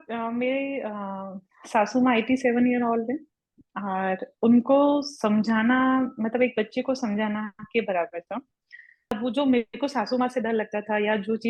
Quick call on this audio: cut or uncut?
cut